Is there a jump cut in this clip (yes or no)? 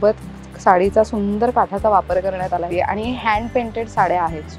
yes